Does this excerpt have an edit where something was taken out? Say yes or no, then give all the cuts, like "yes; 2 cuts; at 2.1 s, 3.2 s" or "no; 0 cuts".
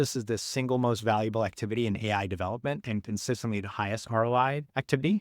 no; 0 cuts